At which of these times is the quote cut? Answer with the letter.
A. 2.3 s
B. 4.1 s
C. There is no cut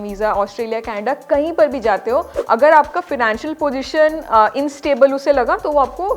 A